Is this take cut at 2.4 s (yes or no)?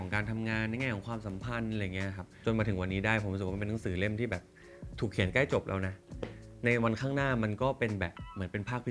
yes